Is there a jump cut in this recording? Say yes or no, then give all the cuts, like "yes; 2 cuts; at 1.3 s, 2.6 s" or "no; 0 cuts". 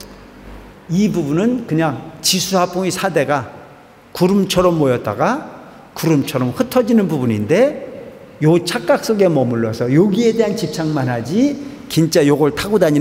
no; 0 cuts